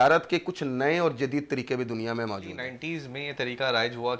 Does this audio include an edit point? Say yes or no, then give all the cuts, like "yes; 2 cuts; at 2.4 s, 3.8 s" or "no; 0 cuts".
yes; 1 cut; at 2.7 s